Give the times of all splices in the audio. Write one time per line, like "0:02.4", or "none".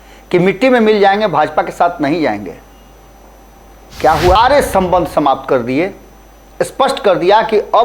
0:04.4

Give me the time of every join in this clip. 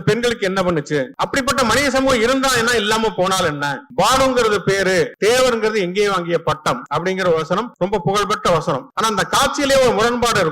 0:01.1
0:03.8
0:05.1
0:06.8
0:07.7
0:08.9

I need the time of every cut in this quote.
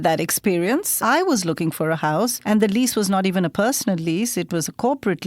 0:00.9
0:02.4

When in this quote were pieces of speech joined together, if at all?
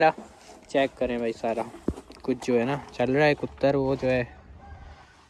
none

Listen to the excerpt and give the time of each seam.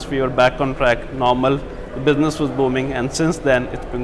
none

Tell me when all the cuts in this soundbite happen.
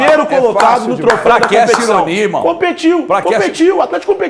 none

